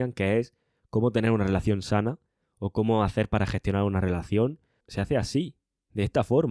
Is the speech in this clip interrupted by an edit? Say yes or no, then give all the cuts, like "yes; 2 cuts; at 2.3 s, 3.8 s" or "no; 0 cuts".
yes; 1 cut; at 4.8 s